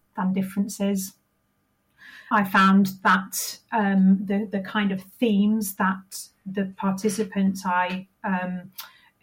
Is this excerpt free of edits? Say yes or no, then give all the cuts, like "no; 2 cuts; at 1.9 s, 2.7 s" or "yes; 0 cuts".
no; 1 cut; at 2.3 s